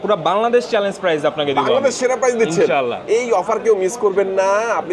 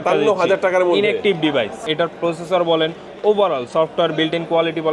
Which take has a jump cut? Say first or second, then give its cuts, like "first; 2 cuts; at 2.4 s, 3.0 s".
second; 1 cut; at 1.9 s